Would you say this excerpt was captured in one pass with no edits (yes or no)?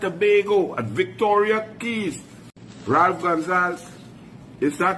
yes